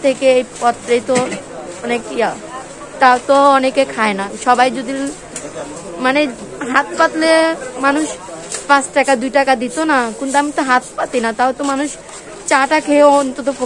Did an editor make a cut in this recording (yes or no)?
no